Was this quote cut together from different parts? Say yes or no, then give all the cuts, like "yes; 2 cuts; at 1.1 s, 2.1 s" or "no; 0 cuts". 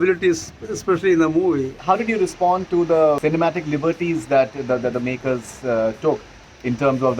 yes; 2 cuts; at 1.8 s, 3.2 s